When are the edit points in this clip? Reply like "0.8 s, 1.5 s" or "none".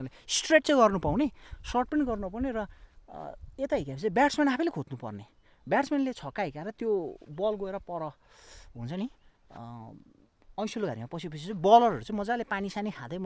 none